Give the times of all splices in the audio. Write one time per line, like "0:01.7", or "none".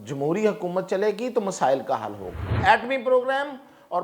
0:02.5